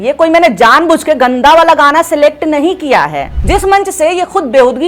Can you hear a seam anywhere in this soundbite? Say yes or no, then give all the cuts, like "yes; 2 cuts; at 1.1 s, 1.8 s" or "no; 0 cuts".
yes; 1 cut; at 3.3 s